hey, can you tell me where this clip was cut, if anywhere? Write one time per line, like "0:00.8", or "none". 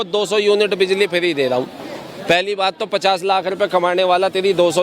none